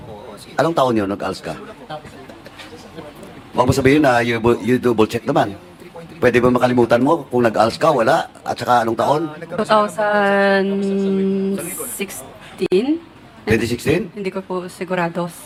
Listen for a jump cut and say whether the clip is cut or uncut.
uncut